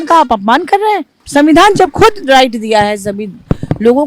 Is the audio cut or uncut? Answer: cut